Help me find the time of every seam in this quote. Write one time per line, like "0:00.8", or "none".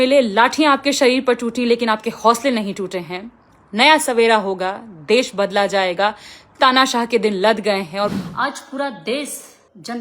0:08.1